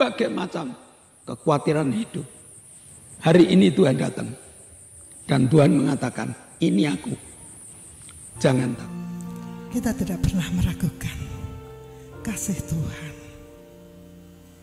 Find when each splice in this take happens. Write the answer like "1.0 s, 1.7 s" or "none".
8.9 s